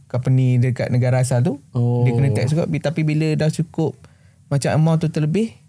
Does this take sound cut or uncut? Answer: uncut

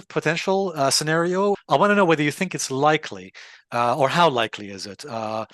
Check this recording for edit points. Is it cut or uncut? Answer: cut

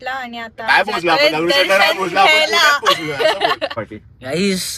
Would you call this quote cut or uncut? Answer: cut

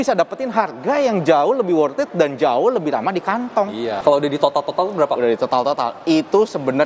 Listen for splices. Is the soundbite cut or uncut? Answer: cut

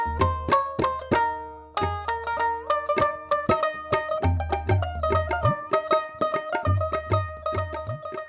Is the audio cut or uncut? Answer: uncut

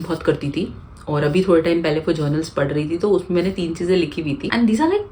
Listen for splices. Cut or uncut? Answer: uncut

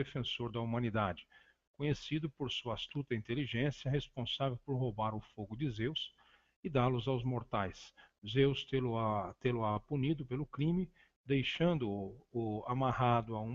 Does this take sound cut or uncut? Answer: uncut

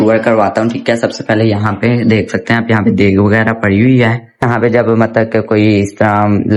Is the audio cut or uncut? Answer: uncut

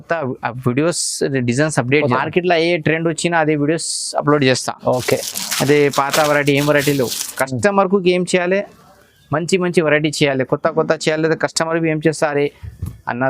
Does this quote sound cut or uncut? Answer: cut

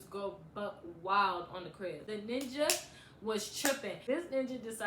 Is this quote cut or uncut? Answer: cut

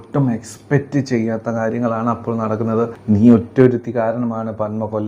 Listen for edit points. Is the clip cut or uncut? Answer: cut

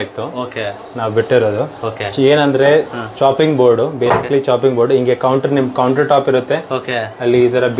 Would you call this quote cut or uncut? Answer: uncut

